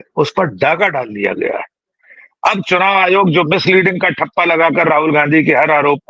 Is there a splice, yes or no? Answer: no